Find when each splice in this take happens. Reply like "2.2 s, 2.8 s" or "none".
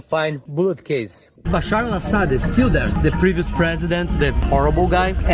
1.4 s